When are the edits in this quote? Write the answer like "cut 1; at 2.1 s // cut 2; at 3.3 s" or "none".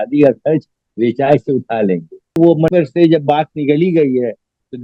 cut 1; at 2.7 s